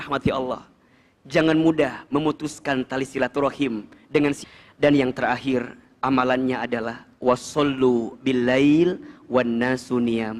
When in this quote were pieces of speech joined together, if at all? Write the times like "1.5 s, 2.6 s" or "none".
4.4 s